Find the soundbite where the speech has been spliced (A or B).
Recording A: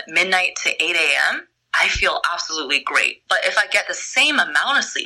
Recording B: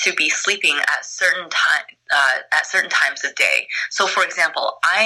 A